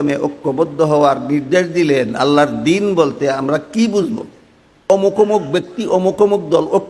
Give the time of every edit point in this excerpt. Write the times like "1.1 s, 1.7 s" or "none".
4.8 s